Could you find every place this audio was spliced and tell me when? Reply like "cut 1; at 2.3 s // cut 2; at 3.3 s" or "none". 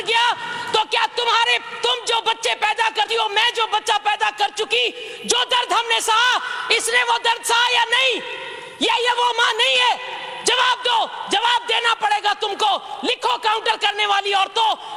none